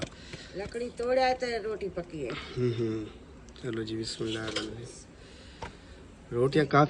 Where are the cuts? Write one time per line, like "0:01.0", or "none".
0:04.5